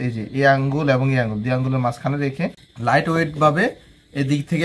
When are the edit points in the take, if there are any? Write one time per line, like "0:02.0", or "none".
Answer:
0:02.7

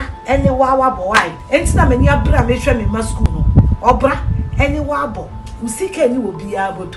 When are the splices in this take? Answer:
0:01.4

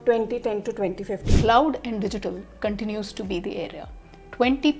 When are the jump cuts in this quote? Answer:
0:01.2

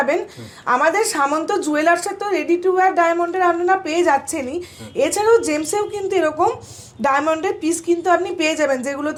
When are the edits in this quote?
none

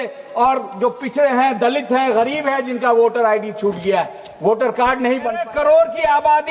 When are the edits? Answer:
0:05.4

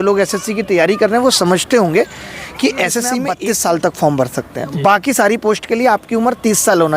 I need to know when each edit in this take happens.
0:03.3

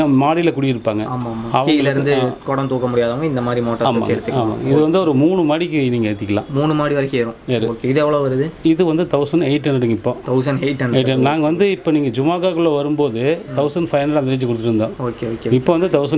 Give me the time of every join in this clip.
none

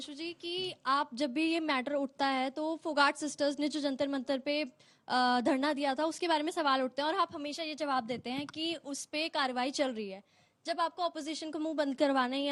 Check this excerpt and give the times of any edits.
none

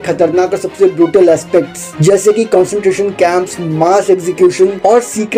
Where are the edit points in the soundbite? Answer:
none

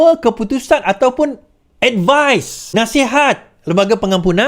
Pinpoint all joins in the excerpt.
0:02.6

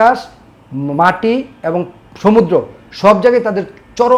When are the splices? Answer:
none

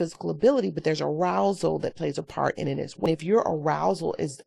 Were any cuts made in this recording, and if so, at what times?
0:03.1

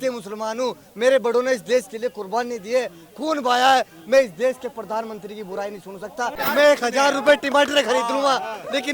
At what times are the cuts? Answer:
0:06.4

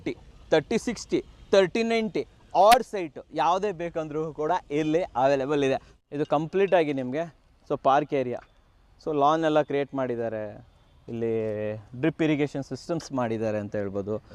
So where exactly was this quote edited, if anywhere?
0:05.9

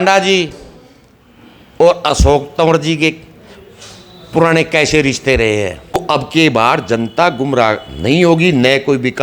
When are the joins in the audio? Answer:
0:06.0

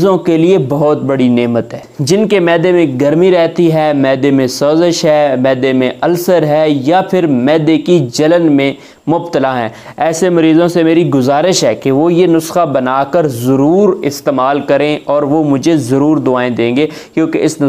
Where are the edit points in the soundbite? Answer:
0:01.8

